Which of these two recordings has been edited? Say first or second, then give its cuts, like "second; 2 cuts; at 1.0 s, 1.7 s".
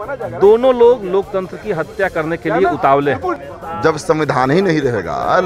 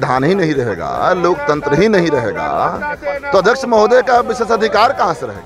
first; 1 cut; at 3.3 s